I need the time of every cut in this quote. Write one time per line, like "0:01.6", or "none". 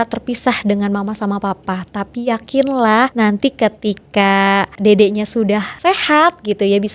0:03.1
0:04.7
0:05.7